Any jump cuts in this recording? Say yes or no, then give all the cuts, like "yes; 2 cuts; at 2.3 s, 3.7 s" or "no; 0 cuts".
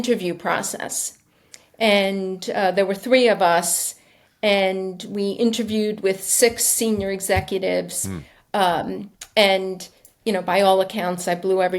no; 0 cuts